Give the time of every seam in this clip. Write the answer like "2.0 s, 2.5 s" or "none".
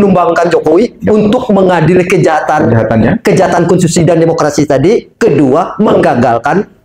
none